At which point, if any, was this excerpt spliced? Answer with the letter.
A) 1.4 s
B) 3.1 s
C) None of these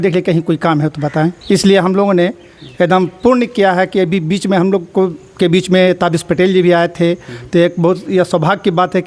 A